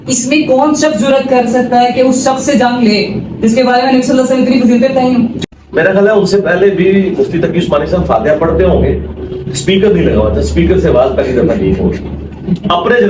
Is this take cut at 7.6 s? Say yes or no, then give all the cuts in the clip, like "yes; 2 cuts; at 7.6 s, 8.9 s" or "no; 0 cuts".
no; 1 cut; at 5.4 s